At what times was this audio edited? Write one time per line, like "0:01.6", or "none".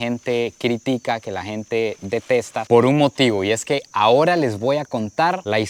none